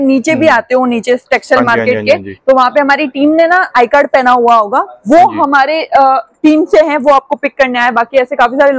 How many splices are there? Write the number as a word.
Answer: zero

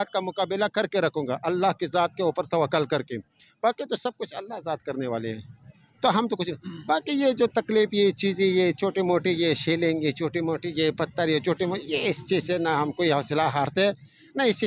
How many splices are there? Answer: zero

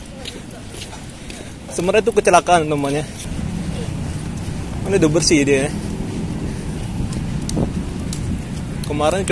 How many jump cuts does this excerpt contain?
one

